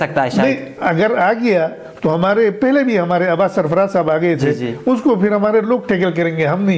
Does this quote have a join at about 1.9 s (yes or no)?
no